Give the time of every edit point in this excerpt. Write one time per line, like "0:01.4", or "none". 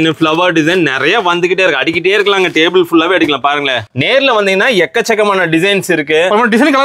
0:03.8